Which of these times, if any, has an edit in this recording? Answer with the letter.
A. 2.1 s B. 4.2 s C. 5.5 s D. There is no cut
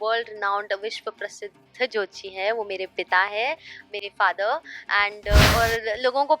C